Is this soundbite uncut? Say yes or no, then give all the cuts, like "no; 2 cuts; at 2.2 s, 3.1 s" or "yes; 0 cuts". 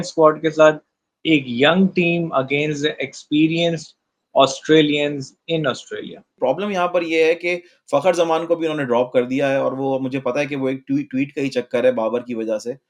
no; 1 cut; at 6.3 s